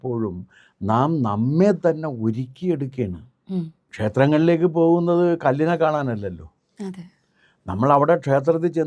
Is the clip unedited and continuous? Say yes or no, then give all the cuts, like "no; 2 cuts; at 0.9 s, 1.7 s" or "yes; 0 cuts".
no; 1 cut; at 3.8 s